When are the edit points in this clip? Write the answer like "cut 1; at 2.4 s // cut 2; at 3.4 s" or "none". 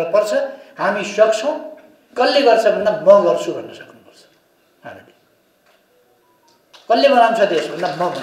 none